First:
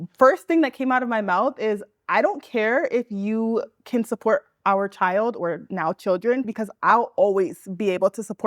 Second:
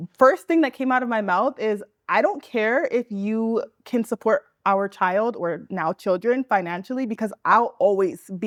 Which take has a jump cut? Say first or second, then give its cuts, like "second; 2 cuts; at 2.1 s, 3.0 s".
first; 1 cut; at 6.5 s